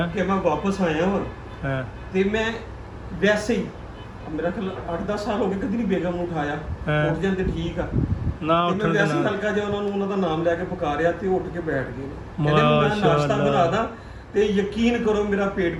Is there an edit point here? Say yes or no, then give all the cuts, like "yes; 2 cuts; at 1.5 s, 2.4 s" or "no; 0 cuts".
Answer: no; 0 cuts